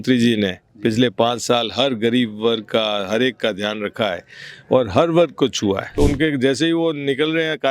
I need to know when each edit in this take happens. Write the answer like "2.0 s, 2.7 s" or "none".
5.9 s